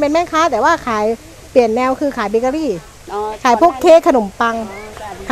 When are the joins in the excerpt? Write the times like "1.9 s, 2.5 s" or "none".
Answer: none

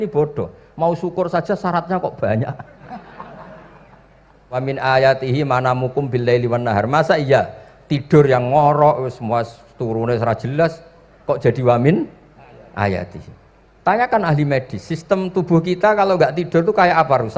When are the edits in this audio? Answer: 4.6 s

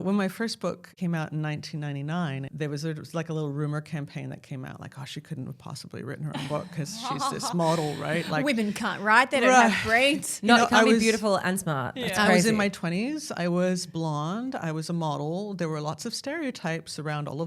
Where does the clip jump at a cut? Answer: 0.9 s, 2.5 s

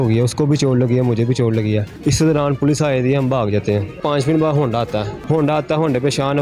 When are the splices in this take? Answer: 1.9 s, 4.0 s, 5.1 s

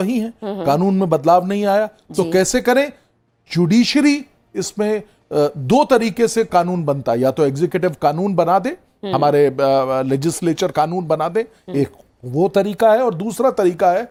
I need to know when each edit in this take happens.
none

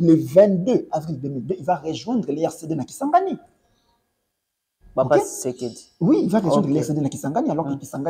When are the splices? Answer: none

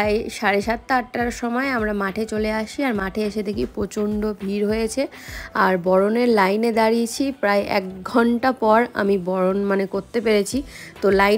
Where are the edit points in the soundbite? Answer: none

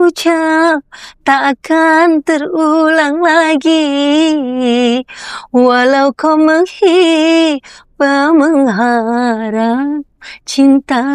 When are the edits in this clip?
none

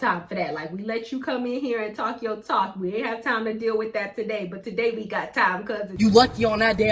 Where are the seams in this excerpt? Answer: 5.9 s

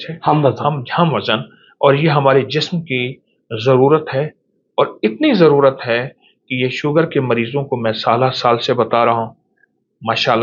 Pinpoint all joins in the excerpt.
none

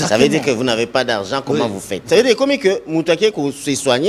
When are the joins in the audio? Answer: 1.9 s

